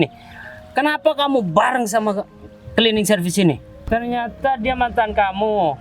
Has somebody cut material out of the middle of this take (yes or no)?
yes